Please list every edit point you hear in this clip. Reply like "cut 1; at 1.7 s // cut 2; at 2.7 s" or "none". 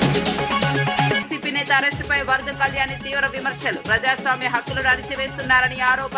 cut 1; at 1.1 s